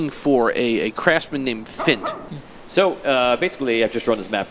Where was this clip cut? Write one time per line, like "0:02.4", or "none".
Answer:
0:02.2